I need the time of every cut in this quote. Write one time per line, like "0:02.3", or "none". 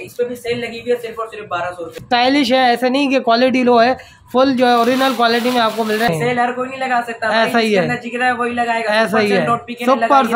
0:02.0
0:06.1